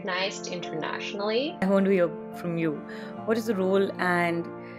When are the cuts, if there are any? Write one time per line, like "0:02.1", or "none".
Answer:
0:01.6